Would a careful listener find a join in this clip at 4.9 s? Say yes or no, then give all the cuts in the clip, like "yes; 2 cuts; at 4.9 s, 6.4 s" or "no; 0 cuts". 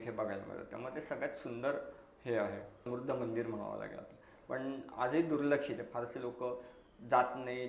yes; 2 cuts; at 2.8 s, 4.9 s